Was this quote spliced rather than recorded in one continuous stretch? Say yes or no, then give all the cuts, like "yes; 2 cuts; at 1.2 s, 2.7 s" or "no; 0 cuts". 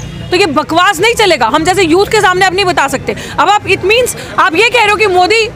no; 0 cuts